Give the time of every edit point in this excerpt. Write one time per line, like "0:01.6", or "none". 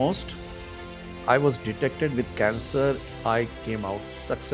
0:03.0